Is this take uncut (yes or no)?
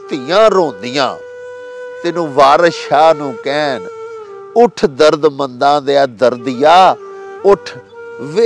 yes